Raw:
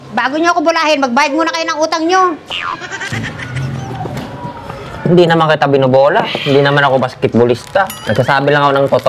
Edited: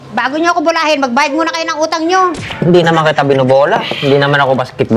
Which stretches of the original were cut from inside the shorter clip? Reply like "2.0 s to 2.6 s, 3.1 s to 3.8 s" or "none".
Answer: 2.5 s to 4.9 s